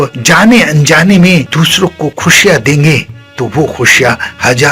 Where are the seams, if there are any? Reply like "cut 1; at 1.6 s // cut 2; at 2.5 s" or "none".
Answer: cut 1; at 1.5 s